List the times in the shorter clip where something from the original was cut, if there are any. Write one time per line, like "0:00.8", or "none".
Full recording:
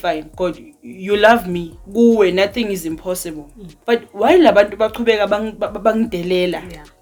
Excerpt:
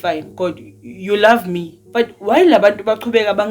0:01.7